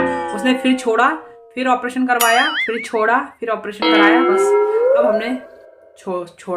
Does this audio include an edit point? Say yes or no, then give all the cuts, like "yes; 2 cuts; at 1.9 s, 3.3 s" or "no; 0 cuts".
no; 0 cuts